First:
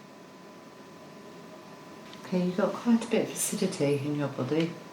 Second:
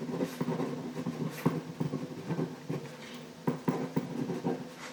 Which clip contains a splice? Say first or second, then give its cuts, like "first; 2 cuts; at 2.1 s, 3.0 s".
first; 1 cut; at 2.1 s